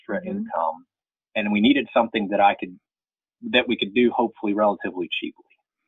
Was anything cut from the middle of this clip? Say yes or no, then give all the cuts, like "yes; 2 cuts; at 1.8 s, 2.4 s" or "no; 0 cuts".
no; 0 cuts